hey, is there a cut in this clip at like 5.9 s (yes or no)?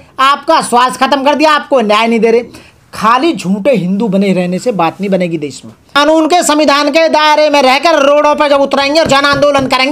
yes